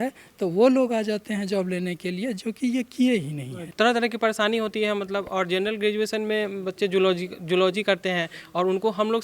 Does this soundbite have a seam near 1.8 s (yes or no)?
no